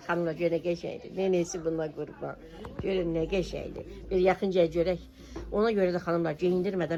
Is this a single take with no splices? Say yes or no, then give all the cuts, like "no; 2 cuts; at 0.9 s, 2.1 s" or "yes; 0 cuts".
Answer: yes; 0 cuts